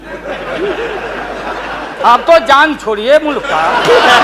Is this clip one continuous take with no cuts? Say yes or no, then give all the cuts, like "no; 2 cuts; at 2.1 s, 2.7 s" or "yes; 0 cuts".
no; 1 cut; at 1.9 s